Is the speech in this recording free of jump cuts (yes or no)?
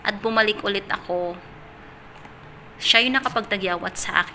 yes